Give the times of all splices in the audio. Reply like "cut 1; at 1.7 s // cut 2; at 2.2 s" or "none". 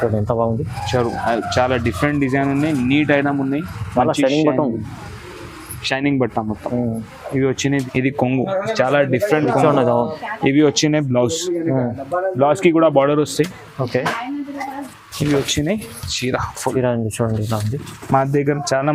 cut 1; at 7.8 s